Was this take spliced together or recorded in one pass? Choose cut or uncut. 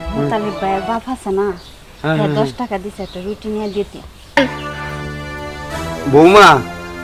cut